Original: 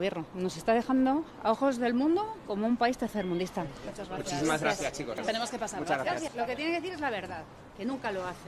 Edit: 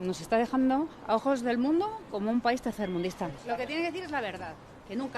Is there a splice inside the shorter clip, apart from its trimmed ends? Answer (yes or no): yes